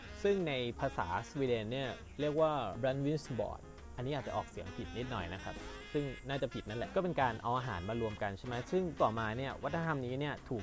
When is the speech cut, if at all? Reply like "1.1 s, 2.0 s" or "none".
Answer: 2.7 s, 6.9 s, 8.9 s